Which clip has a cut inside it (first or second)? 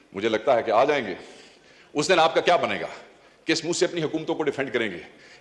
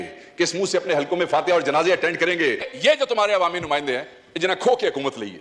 second